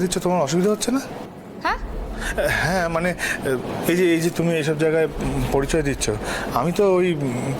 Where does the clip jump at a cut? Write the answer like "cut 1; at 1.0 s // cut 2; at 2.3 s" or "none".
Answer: none